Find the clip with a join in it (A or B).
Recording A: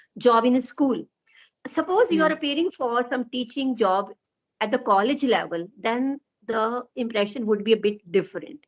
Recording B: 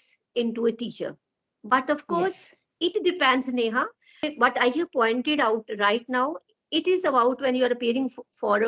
B